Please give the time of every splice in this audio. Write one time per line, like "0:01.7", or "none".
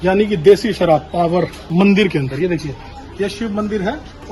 0:01.6